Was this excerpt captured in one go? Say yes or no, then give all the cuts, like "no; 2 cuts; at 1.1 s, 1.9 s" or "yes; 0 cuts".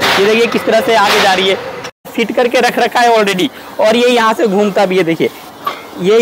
no; 1 cut; at 2.1 s